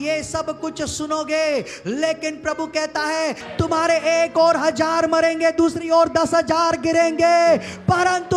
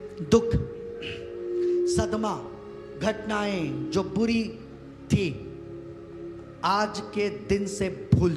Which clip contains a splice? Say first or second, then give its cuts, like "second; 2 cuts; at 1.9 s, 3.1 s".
first; 1 cut; at 3.4 s